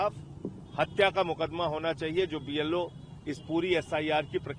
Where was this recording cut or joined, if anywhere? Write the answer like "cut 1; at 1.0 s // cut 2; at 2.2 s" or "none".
none